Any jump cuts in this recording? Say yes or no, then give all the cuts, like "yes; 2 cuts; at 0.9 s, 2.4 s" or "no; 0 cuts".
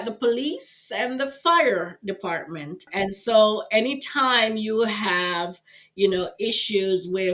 yes; 1 cut; at 2.8 s